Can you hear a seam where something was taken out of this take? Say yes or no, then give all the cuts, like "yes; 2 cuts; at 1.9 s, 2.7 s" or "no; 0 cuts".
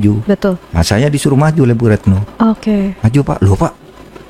no; 0 cuts